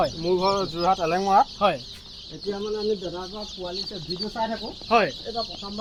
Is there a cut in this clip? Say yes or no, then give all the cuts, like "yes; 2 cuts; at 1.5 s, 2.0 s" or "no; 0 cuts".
no; 0 cuts